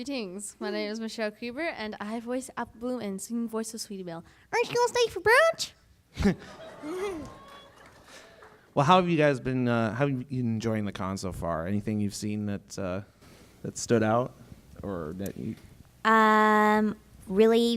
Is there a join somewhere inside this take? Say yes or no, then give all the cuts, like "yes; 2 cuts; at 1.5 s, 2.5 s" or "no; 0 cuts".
no; 0 cuts